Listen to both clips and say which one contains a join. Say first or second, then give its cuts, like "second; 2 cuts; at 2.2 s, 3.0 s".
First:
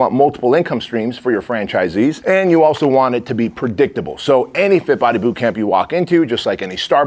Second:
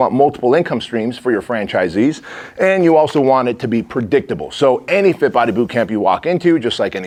first; 1 cut; at 2.2 s